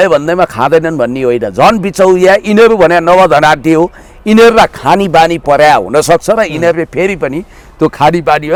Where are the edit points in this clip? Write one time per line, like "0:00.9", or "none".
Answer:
none

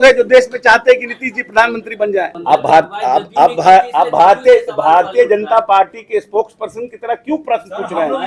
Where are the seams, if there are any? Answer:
0:02.3

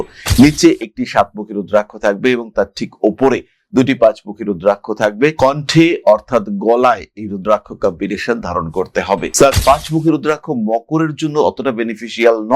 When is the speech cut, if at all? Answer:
0:09.6

